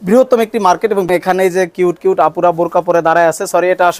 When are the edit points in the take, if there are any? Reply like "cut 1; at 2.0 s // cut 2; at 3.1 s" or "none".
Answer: cut 1; at 1.1 s